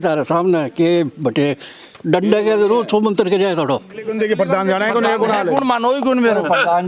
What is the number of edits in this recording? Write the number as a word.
one